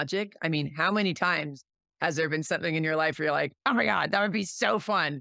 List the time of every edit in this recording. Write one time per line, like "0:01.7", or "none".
none